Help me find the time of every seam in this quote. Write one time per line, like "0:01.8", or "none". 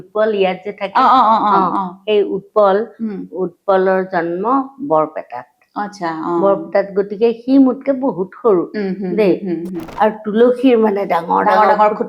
0:09.8

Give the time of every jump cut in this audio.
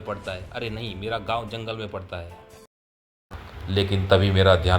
0:03.3

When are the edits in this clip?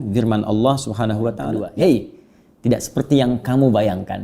0:01.6

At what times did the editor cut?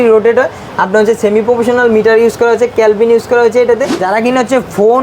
0:04.0

